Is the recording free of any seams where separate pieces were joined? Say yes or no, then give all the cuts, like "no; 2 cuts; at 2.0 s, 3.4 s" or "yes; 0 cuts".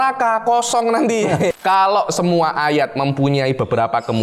no; 1 cut; at 1.5 s